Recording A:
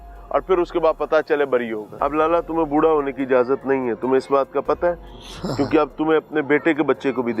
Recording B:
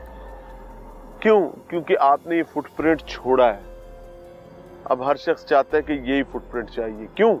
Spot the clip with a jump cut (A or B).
A